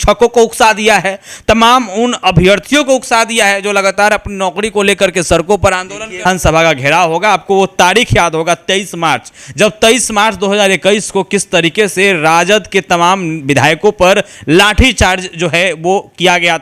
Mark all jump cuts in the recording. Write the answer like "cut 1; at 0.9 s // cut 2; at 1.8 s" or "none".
cut 1; at 6.2 s

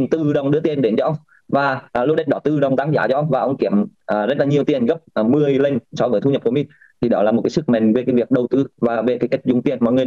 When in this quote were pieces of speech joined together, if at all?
none

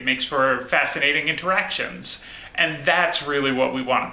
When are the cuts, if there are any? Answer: none

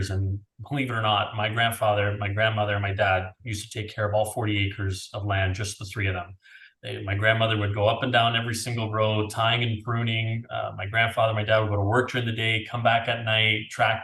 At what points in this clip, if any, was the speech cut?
none

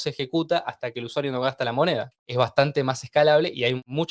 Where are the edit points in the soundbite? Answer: cut 1; at 2.2 s

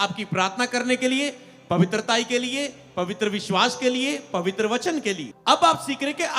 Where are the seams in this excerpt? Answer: cut 1; at 5.3 s

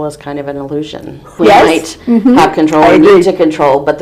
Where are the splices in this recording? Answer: cut 1; at 1.3 s

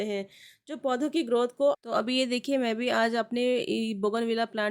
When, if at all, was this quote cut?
cut 1; at 1.8 s

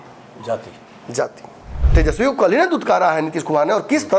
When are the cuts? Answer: cut 1; at 1.8 s

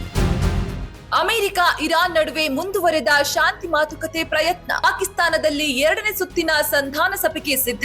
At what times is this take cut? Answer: none

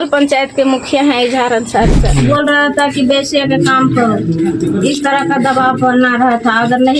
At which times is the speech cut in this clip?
cut 1; at 2.1 s

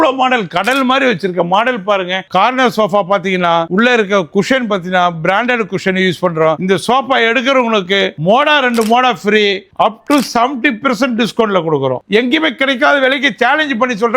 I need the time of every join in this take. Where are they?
cut 1; at 2.3 s // cut 2; at 6.6 s // cut 3; at 12.0 s

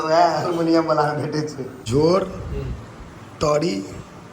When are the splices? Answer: cut 1; at 1.9 s

